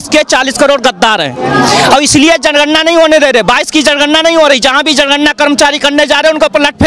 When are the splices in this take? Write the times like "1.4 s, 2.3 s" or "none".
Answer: none